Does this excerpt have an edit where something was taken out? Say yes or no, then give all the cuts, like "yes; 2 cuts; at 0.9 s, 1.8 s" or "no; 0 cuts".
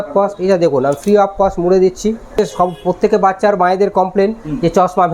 yes; 1 cut; at 2.3 s